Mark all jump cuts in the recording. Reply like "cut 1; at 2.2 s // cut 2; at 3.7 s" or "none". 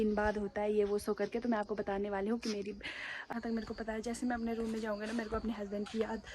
cut 1; at 3.3 s